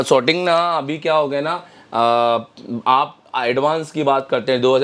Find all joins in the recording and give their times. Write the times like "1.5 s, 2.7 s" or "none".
none